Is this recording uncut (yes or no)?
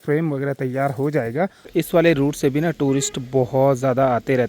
no